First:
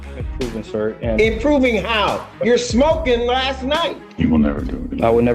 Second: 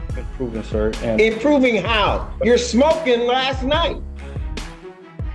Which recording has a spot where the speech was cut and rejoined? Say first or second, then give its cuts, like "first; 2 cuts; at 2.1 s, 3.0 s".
first; 1 cut; at 4.0 s